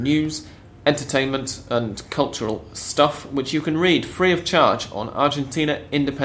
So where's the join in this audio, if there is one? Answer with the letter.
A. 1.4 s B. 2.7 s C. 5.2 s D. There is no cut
D